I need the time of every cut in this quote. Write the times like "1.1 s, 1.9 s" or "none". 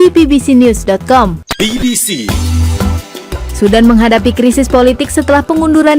3.4 s